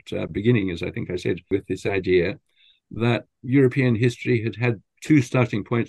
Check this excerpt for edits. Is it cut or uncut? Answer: cut